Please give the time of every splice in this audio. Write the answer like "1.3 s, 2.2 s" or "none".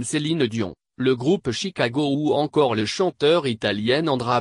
2.5 s